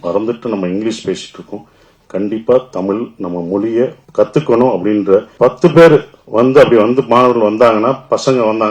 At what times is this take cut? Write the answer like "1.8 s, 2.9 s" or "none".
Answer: 4.0 s, 5.3 s